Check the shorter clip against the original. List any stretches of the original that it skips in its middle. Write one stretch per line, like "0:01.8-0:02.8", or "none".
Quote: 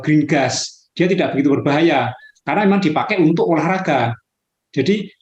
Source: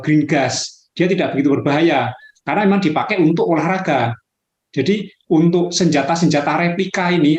none